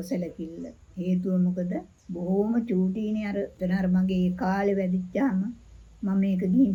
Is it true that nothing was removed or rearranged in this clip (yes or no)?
yes